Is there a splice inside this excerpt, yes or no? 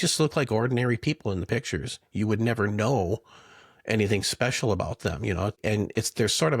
yes